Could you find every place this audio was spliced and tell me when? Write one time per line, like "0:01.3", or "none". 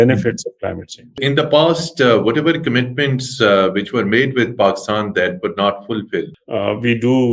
0:01.2
0:06.4